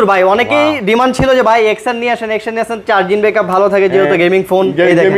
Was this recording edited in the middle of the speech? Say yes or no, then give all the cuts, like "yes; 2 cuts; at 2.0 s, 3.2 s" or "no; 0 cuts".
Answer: no; 0 cuts